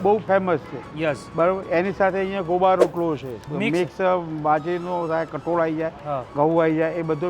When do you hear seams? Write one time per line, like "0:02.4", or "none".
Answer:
none